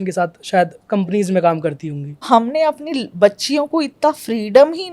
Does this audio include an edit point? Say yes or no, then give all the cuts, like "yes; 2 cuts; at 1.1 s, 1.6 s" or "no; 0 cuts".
yes; 1 cut; at 2.3 s